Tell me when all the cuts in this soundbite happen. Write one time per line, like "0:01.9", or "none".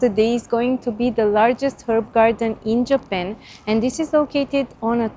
none